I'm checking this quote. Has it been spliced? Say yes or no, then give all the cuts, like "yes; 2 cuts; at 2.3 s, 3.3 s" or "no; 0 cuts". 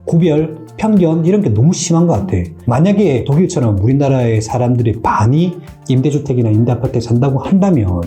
yes; 1 cut; at 2.6 s